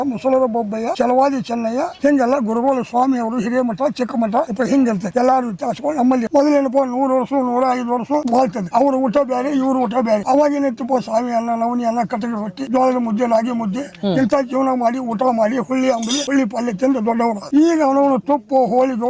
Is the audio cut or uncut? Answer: cut